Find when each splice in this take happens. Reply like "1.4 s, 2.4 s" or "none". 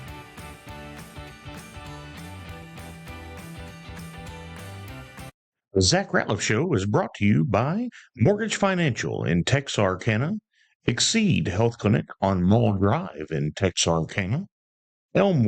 5.5 s